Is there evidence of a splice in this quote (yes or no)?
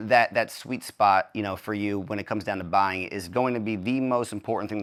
no